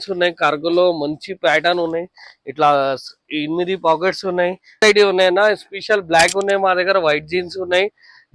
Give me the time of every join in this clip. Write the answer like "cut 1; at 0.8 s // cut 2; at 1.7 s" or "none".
cut 1; at 4.8 s